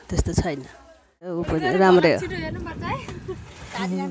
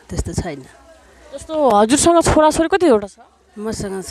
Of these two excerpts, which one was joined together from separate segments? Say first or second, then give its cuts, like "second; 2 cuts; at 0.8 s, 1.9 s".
first; 1 cut; at 1.4 s